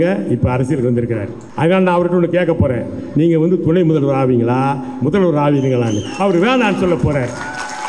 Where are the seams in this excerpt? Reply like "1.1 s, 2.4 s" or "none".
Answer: 1.4 s